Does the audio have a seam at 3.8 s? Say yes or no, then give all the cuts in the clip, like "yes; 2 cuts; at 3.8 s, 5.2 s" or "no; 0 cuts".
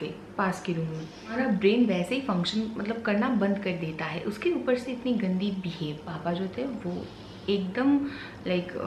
no; 2 cuts; at 1.3 s, 6.0 s